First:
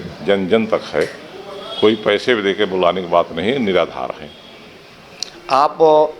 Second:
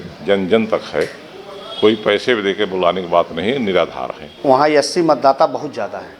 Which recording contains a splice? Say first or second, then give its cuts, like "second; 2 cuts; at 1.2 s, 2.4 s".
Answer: second; 1 cut; at 4.3 s